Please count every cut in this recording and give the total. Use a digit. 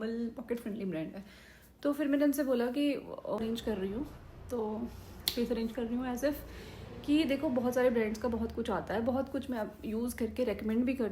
1